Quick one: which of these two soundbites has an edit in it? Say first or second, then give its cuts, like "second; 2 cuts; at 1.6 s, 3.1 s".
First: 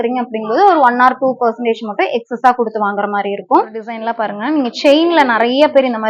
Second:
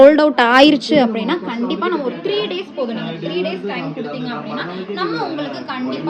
first; 1 cut; at 3.9 s